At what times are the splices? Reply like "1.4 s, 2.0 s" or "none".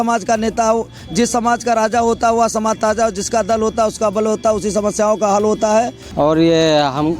6.0 s